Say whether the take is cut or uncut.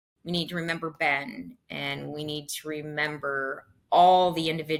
uncut